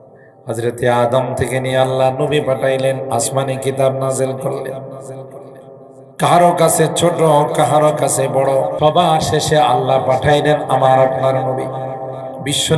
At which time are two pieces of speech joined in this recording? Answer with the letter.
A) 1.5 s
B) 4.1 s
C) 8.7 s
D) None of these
C